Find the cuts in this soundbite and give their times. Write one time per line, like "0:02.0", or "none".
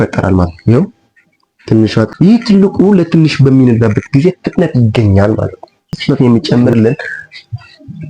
0:02.1
0:06.0